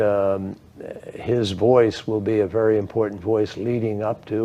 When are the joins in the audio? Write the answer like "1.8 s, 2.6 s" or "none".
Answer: none

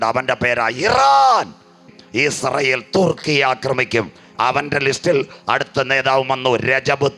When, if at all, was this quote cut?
1.9 s

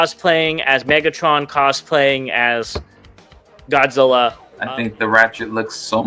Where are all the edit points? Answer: 4.5 s

